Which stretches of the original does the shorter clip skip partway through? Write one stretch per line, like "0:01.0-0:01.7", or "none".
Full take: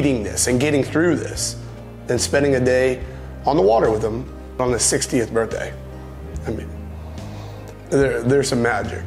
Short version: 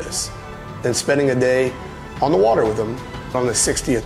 none